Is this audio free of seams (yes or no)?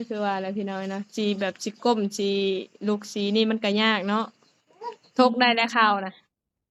yes